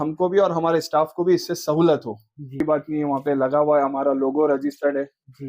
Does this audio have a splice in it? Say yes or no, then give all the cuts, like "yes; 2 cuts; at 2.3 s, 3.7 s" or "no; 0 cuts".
yes; 1 cut; at 2.6 s